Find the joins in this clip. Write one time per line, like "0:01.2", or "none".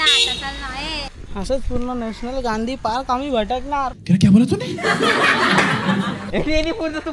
0:01.1
0:06.2